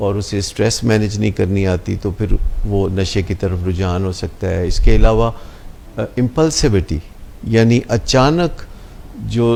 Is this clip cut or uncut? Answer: uncut